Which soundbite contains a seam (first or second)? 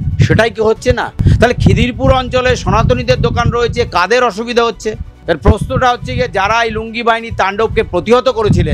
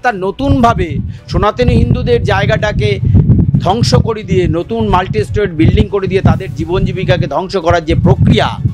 first